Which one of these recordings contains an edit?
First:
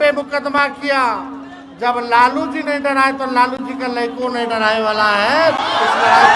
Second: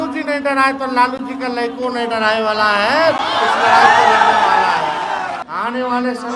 second; 1 cut; at 5.4 s

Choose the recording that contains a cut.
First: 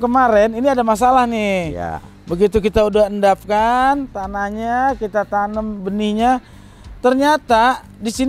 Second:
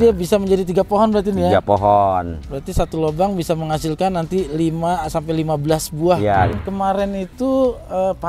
second; 1 cut; at 6.6 s

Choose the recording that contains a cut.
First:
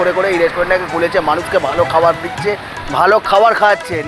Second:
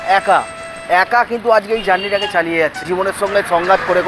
second; 1 cut; at 2.8 s

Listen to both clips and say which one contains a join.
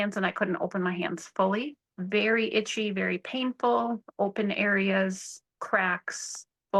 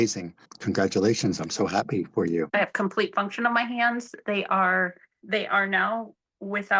second; 1 cut; at 2.5 s

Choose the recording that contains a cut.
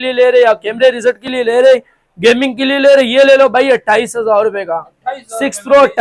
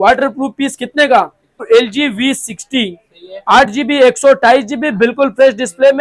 second; 1 cut; at 1.6 s

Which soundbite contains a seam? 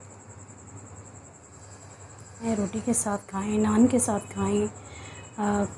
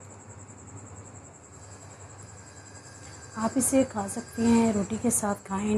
first; 1 cut; at 2.5 s

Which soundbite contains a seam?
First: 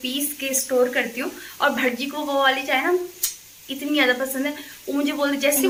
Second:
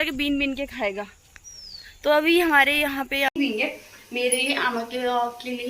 second; 1 cut; at 3.3 s

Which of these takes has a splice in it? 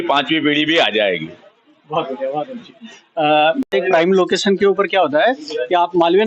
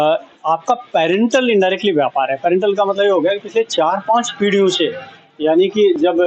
first; 1 cut; at 3.7 s

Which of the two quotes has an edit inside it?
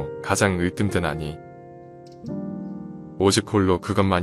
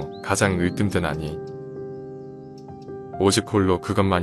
second; 2 cuts; at 1.4 s, 3.2 s

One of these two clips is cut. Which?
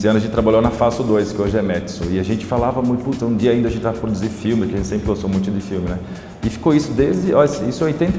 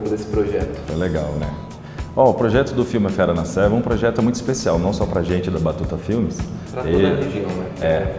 first; 1 cut; at 3.2 s

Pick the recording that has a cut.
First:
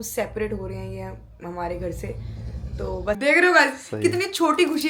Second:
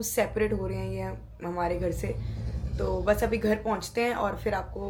first; 1 cut; at 3.2 s

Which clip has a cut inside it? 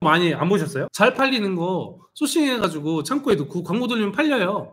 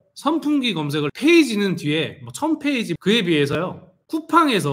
second; 2 cuts; at 1.1 s, 3.0 s

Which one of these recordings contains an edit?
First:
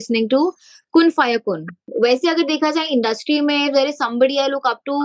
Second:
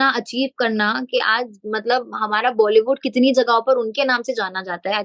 first; 1 cut; at 1.9 s

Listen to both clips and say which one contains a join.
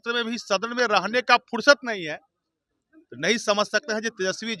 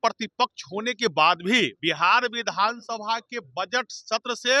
second; 1 cut; at 1.8 s

